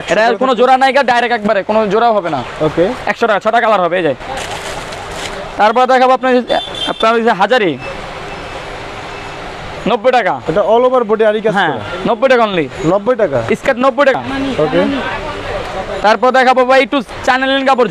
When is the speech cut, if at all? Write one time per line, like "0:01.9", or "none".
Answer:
none